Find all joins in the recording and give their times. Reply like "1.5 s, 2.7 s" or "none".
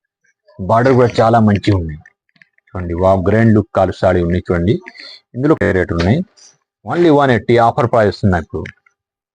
5.6 s